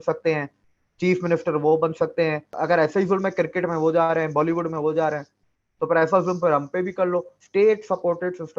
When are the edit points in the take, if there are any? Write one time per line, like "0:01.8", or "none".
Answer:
0:02.5
0:07.4